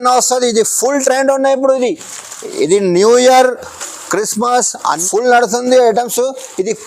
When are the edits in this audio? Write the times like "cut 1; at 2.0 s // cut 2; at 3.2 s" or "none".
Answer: cut 1; at 5.0 s